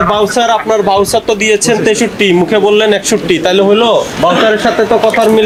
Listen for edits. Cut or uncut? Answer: uncut